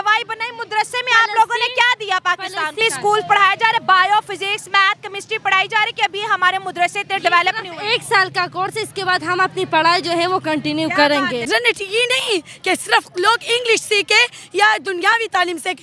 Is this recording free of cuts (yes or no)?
no